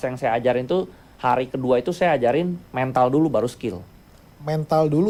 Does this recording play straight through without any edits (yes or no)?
yes